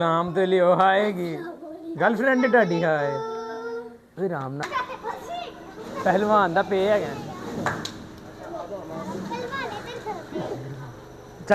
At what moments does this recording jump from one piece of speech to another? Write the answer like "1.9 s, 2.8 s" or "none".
4.6 s